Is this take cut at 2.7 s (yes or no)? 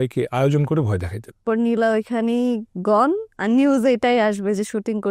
no